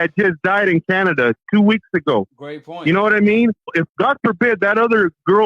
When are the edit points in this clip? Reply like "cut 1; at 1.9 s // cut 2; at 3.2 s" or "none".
cut 1; at 3.7 s